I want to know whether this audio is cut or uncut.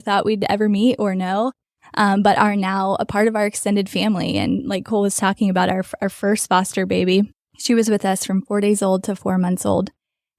cut